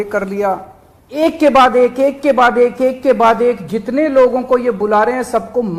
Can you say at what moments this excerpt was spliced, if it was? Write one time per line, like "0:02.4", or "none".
0:01.2